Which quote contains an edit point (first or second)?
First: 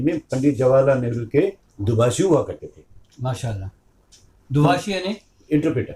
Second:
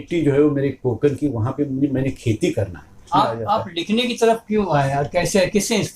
second